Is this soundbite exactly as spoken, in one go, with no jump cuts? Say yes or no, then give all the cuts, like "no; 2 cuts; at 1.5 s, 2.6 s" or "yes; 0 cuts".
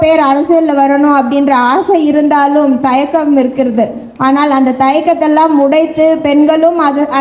yes; 0 cuts